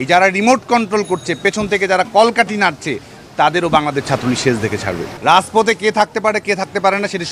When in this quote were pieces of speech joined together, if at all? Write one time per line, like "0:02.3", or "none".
0:05.1